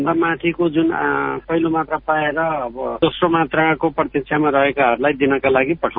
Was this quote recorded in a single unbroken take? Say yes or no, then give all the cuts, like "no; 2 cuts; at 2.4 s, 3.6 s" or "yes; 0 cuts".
no; 1 cut; at 1.4 s